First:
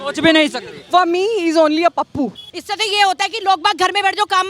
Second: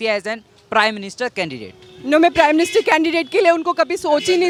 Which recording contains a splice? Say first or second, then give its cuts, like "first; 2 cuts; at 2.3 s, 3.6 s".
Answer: first; 1 cut; at 2.5 s